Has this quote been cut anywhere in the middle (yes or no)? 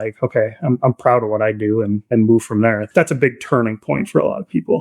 yes